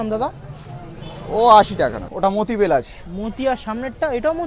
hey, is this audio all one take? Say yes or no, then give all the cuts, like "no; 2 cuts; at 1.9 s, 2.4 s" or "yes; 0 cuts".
no; 1 cut; at 2.0 s